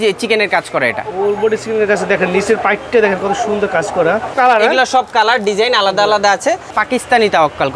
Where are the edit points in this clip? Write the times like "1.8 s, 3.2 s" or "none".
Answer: 4.3 s, 6.7 s

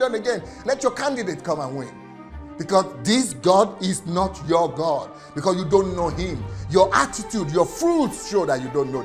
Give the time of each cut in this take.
none

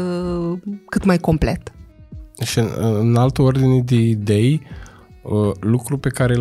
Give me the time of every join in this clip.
none

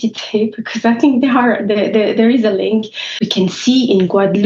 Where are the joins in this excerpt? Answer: 3.2 s

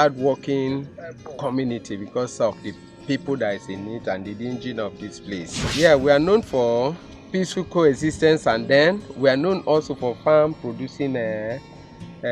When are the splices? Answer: 5.6 s

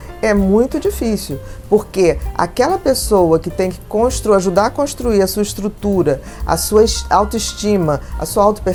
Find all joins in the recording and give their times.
none

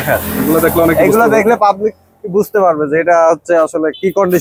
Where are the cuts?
none

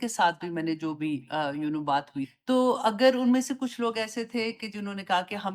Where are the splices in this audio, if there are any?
none

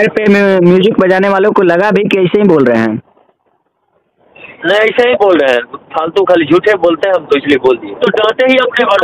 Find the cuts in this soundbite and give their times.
8.0 s

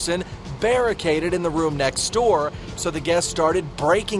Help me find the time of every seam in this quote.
2.7 s

